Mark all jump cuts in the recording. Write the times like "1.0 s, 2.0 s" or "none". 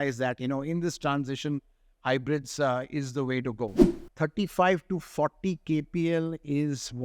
3.8 s